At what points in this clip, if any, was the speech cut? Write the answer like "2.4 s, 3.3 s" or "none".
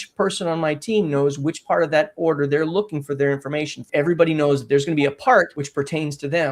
3.8 s, 5.6 s